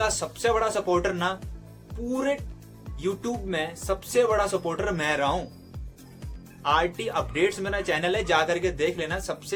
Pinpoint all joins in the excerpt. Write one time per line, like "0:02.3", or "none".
none